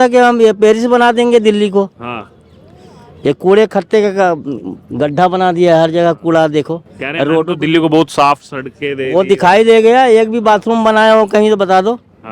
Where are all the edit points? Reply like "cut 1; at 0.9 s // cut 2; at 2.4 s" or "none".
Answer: none